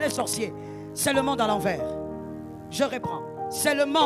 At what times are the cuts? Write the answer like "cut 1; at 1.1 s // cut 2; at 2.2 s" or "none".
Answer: cut 1; at 2.1 s